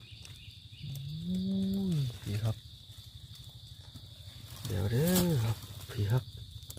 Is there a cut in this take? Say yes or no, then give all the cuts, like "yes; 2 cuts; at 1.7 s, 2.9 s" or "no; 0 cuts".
no; 0 cuts